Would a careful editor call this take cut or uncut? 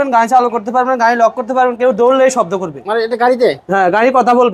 uncut